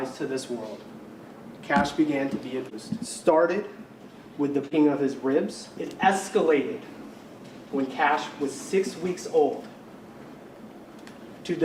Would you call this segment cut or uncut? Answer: cut